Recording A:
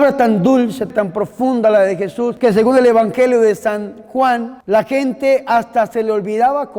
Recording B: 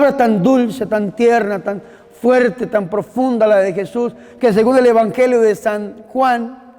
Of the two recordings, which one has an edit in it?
A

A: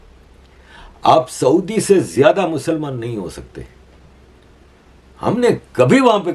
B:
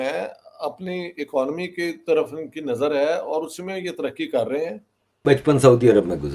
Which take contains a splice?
B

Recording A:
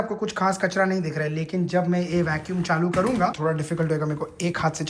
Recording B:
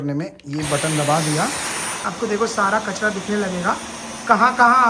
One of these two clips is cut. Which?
B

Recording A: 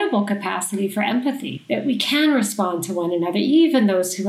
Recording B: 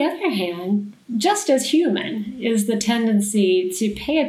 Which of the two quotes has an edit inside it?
A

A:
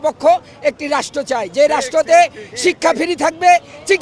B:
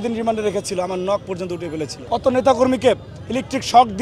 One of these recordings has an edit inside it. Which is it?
B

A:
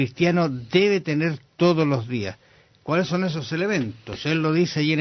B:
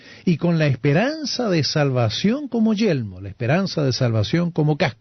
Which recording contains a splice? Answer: A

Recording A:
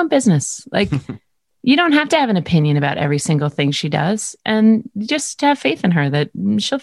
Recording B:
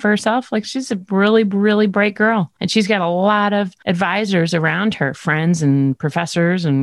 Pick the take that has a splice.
B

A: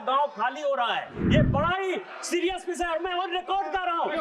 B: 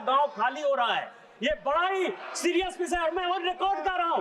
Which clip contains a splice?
A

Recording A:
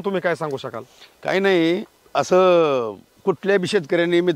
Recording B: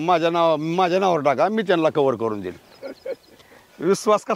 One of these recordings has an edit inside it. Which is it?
A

